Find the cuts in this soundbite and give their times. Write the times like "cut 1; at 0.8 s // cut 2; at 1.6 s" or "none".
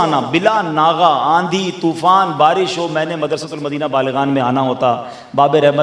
none